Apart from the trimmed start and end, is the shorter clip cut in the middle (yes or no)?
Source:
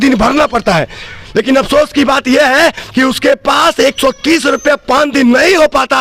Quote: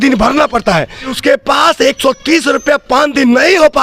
yes